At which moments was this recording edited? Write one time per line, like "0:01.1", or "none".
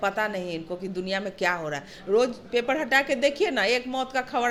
none